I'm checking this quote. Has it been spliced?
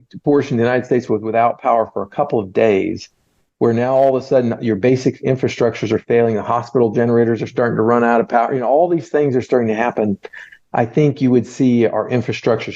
no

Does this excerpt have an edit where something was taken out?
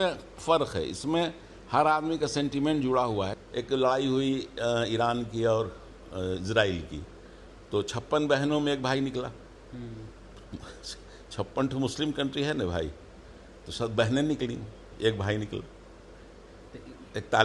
yes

